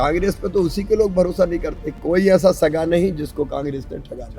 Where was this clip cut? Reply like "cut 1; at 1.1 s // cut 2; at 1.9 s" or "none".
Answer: cut 1; at 2.0 s